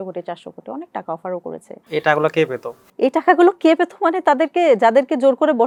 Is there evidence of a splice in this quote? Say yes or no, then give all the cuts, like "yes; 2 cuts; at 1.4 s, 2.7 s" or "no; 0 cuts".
no; 0 cuts